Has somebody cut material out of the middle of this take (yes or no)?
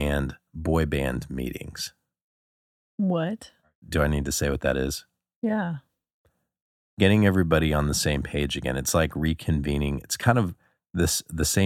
yes